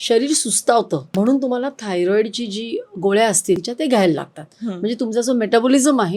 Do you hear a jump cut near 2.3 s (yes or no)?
no